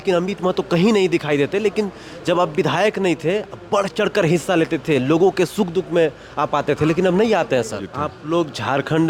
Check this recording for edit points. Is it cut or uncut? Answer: cut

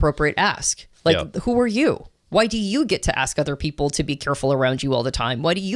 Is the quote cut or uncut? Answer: uncut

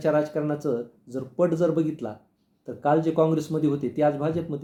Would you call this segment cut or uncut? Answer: uncut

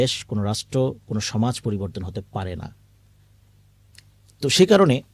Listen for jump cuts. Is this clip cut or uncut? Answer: uncut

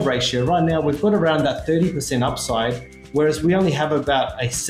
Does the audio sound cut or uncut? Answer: uncut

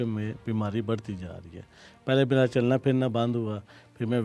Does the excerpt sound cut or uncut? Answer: uncut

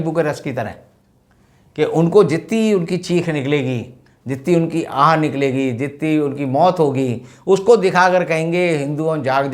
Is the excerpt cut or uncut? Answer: uncut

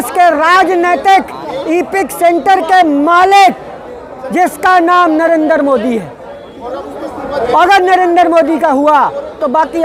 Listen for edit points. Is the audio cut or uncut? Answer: uncut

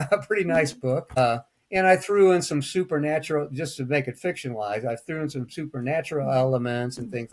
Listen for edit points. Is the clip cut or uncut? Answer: cut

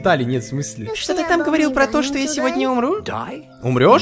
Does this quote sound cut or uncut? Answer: cut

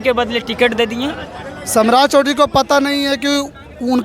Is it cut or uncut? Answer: uncut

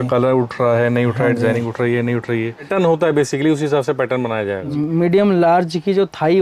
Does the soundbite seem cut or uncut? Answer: cut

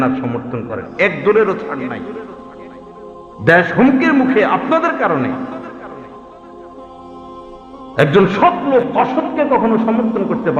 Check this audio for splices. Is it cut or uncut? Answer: cut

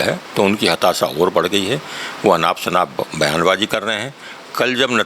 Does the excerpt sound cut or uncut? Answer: uncut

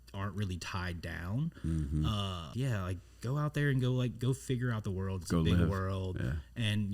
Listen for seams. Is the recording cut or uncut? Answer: cut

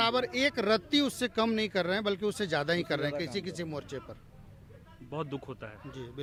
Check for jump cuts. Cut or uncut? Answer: uncut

